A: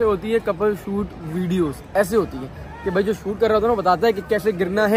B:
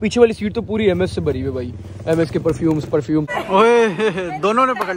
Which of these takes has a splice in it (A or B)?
B